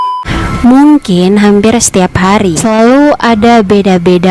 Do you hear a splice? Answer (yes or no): yes